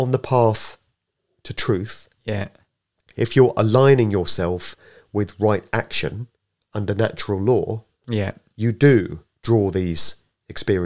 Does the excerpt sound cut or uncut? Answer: uncut